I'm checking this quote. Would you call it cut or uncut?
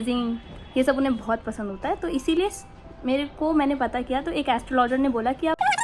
uncut